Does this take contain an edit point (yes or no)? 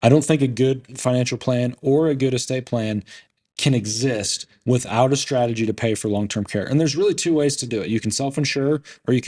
no